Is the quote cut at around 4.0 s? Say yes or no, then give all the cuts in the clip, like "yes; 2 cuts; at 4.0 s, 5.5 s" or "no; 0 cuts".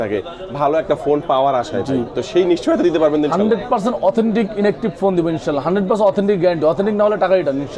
no; 0 cuts